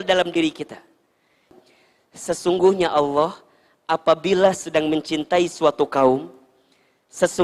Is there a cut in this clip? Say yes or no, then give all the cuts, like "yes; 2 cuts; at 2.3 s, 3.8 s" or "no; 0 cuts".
yes; 1 cut; at 1.5 s